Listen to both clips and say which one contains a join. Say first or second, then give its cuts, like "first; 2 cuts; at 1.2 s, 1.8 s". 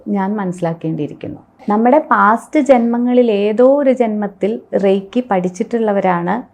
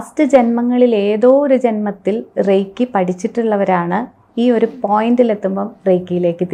first; 1 cut; at 1.4 s